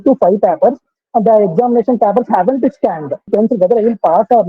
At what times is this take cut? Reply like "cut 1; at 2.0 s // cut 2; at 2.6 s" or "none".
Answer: cut 1; at 3.3 s